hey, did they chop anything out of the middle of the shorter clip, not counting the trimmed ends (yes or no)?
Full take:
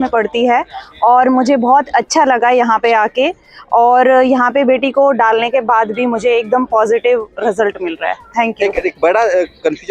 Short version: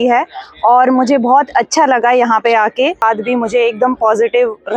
yes